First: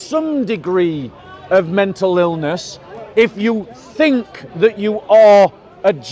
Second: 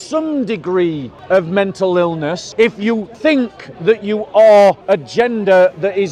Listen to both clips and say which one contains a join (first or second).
second